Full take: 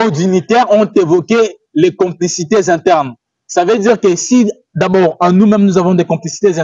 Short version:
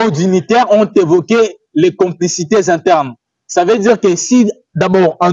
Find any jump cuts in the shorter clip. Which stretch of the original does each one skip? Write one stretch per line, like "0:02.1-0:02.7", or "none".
none